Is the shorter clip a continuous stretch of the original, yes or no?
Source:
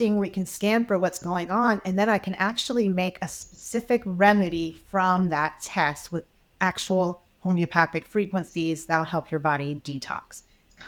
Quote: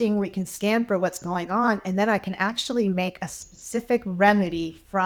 yes